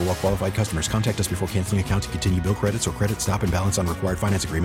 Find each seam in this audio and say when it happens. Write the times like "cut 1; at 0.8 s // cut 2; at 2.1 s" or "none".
none